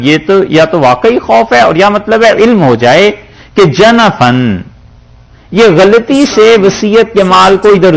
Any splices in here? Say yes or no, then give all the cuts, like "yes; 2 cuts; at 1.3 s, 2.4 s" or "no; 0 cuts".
no; 0 cuts